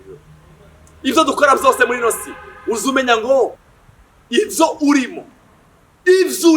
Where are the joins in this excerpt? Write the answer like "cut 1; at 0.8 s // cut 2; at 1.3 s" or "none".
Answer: cut 1; at 3.6 s